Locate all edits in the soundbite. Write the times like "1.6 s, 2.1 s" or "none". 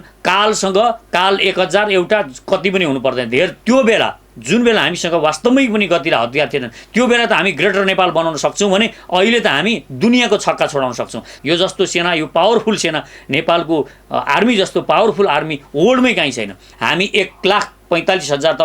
3.6 s, 11.3 s, 16.7 s